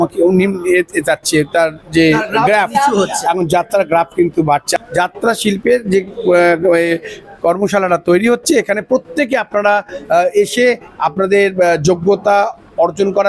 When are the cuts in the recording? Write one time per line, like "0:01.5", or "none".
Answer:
0:04.8